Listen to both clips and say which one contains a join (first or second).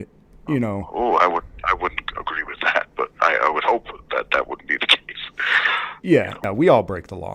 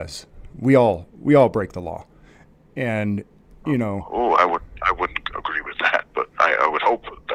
first